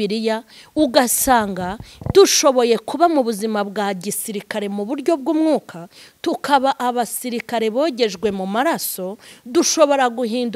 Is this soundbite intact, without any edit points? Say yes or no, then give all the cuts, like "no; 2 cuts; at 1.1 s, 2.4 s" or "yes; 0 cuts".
yes; 0 cuts